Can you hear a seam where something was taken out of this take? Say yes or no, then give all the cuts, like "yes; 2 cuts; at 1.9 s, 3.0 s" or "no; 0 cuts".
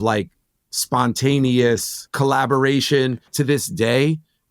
yes; 2 cuts; at 2.0 s, 3.3 s